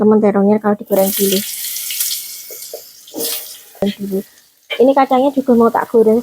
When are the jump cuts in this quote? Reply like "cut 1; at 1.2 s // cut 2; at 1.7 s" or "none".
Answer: cut 1; at 3.8 s